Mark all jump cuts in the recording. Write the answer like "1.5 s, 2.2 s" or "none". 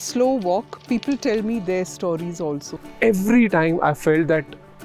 2.7 s